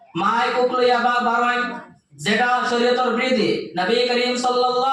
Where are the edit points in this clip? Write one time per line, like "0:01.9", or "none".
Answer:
none